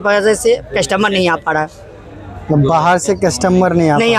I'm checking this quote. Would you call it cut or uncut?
uncut